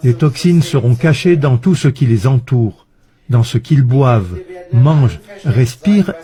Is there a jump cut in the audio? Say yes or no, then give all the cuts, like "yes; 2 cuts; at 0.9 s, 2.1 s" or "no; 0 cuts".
no; 0 cuts